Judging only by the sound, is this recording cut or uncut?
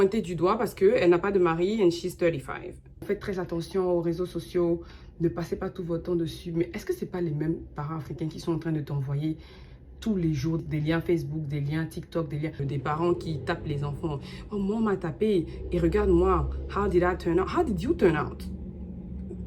cut